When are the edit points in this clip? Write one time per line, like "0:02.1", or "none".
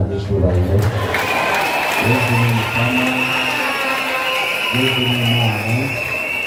none